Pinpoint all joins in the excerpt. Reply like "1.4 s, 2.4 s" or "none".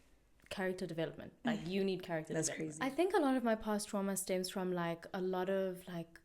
2.7 s